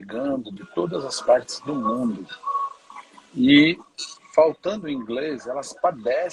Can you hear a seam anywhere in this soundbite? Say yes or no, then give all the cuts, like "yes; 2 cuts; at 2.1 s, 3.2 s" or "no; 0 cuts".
no; 0 cuts